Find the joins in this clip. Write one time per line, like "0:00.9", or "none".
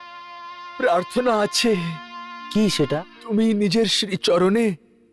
0:03.0